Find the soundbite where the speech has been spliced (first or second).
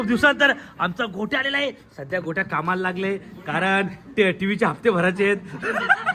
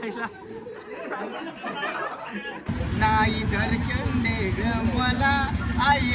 second